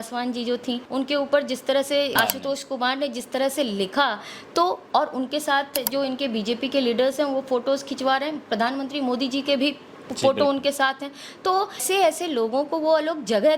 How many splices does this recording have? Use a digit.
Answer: 3